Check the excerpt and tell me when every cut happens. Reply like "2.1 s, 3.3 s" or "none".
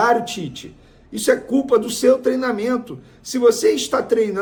none